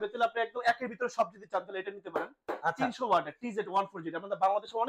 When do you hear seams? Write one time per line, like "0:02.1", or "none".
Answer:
none